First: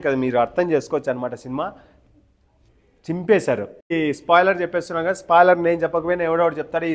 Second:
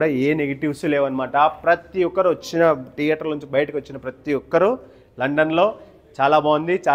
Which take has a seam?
first; 1 cut; at 3.9 s

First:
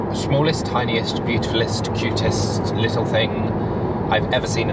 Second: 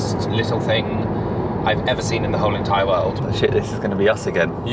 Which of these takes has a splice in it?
second; 1 cut; at 3.2 s

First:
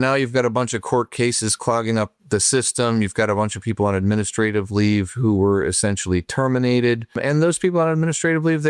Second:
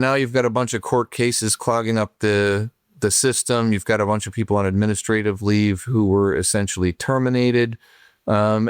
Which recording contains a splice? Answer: first; 2 cuts; at 2.1 s, 7.2 s

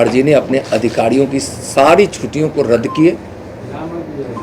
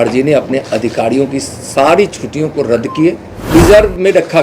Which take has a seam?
second; 1 cut; at 3.3 s

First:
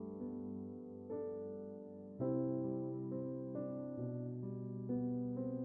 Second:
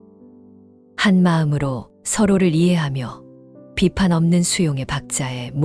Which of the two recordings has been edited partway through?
second; 1 cut; at 1.0 s

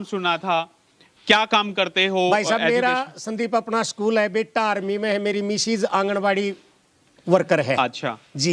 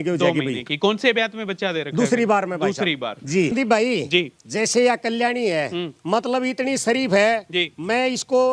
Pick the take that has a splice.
second; 1 cut; at 3.5 s

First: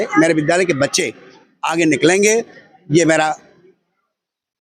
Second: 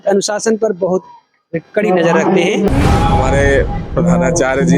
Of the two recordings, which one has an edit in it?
second; 1 cut; at 2.7 s

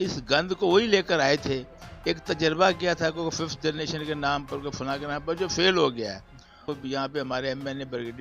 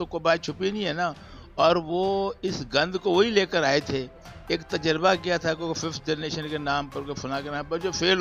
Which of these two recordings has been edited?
first; 1 cut; at 6.8 s

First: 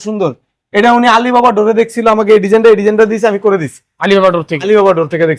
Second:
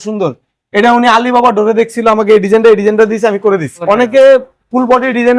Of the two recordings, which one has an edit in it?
second; 1 cut; at 3.8 s

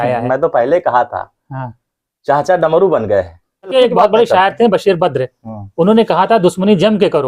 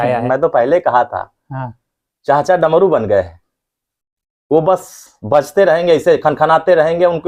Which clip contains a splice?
first; 1 cut; at 3.7 s

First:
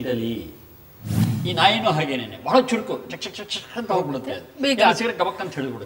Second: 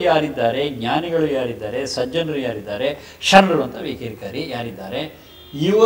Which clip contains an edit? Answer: first; 1 cut; at 1.3 s

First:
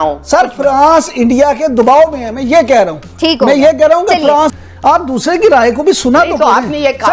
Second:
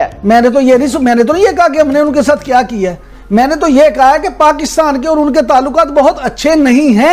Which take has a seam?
first; 1 cut; at 4.6 s

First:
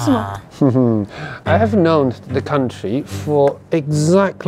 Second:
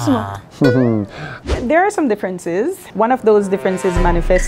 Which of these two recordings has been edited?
second; 1 cut; at 1.3 s

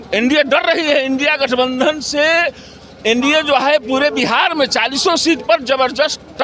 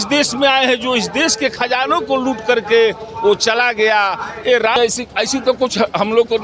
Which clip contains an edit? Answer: second; 1 cut; at 4.8 s

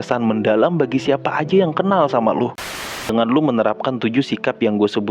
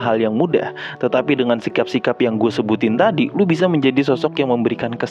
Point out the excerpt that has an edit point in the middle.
first; 1 cut; at 2.8 s

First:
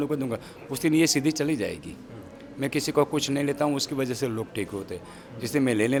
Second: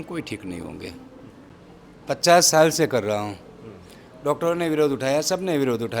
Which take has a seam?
second; 1 cut; at 1.5 s

